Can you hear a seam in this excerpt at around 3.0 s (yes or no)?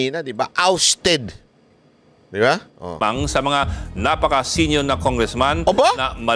yes